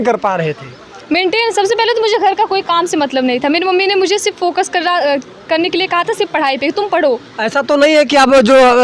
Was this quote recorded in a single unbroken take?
yes; 0 cuts

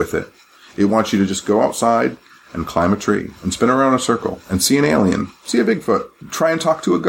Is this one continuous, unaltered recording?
no; 1 cut; at 6.2 s

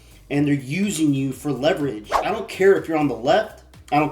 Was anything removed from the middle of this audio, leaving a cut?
yes; 1 cut; at 2.2 s

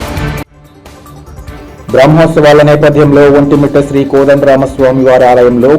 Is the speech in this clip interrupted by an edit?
yes; 1 cut; at 1.3 s

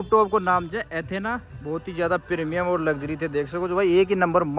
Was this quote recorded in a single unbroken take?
yes; 0 cuts

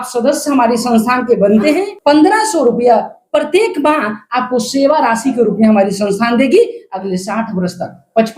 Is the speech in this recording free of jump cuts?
no; 1 cut; at 1.9 s

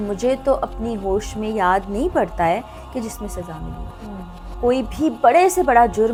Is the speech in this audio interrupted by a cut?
no; 0 cuts

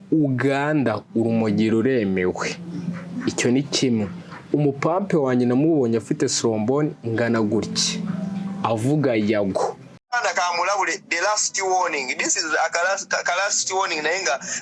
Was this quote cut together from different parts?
yes; 1 cut; at 10.1 s

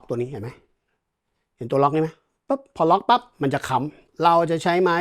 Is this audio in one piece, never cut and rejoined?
no; 1 cut; at 4.1 s

